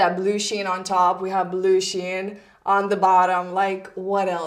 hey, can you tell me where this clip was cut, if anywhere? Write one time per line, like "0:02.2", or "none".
none